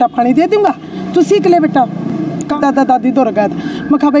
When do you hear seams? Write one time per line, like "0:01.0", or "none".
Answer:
0:02.6

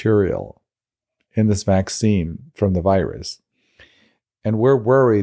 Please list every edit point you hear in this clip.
0:02.4

